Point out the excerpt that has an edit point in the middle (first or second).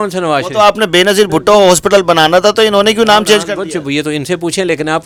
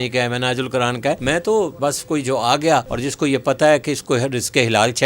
second